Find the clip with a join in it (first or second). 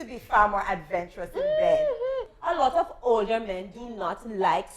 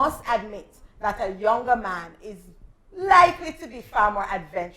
first